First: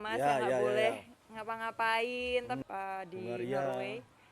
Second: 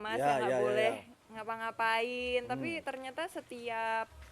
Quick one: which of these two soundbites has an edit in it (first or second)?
first